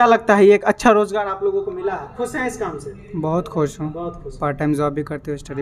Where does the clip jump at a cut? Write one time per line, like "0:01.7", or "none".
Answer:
none